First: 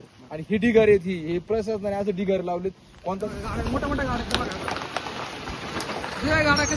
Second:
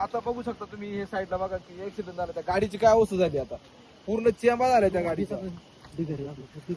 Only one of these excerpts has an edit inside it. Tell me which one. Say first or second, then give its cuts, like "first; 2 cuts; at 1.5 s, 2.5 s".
first; 1 cut; at 3.3 s